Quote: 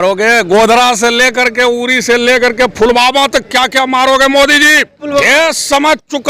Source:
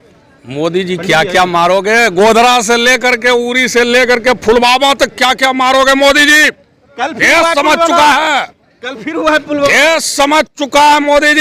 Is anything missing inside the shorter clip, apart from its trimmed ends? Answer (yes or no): yes